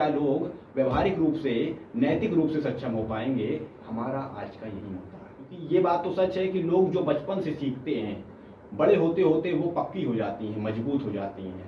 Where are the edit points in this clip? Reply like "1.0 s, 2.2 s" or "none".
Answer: 5.5 s